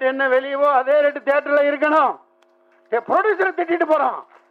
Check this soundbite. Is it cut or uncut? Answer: uncut